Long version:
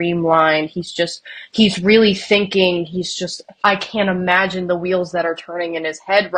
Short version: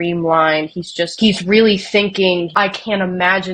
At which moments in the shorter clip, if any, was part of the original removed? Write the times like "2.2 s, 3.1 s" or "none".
1.1 s, 2.5 s